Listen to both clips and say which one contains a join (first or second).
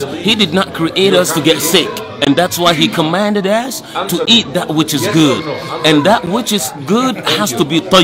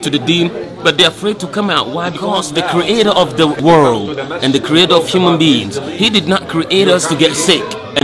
second